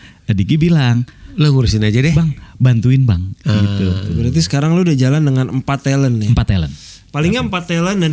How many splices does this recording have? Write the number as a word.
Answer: one